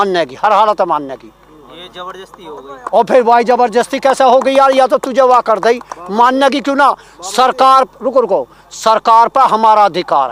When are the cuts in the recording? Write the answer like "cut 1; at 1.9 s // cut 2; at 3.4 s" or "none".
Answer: none